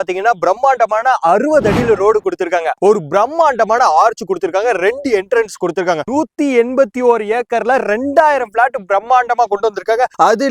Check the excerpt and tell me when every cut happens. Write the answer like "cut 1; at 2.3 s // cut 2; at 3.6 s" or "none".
cut 1; at 2.8 s // cut 2; at 6.0 s

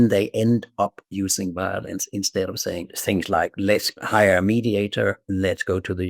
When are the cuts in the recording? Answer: cut 1; at 2.9 s // cut 2; at 4.0 s

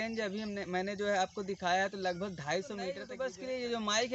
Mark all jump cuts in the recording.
cut 1; at 3.1 s

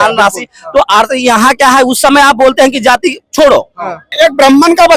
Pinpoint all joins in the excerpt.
cut 1; at 4.1 s

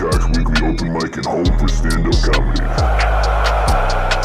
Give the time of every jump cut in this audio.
none

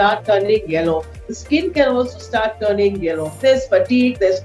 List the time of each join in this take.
cut 1; at 3.4 s

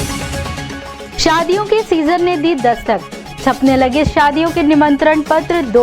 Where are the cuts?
cut 1; at 1.1 s

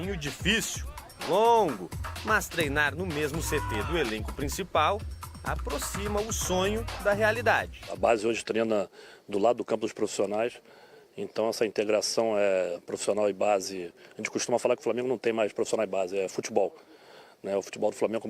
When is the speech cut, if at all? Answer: cut 1; at 16.4 s

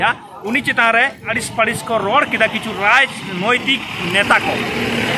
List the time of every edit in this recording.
cut 1; at 1.3 s

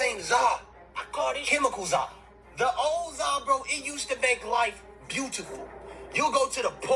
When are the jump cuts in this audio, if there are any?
cut 1; at 1.4 s

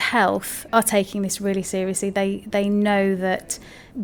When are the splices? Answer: none

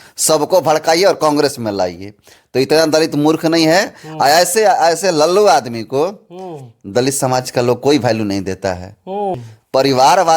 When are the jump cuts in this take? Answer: cut 1; at 9.4 s

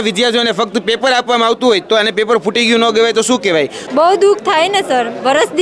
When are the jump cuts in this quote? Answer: cut 1; at 3.8 s

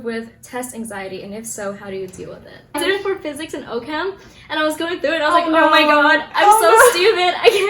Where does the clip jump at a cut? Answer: cut 1; at 2.8 s

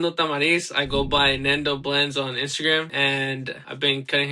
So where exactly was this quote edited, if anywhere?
cut 1; at 3.2 s

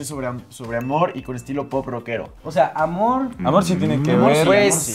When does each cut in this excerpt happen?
none

